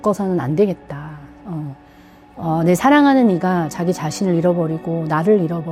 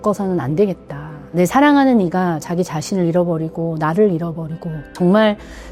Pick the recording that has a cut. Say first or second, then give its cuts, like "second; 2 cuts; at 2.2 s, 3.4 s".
second; 2 cuts; at 1.3 s, 4.9 s